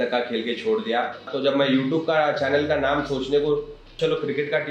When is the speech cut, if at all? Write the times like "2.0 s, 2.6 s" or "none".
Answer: 1.3 s, 3.9 s